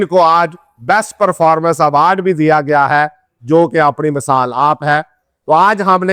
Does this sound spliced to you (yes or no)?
no